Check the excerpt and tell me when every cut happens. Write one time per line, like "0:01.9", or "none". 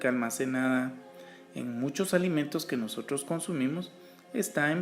0:02.8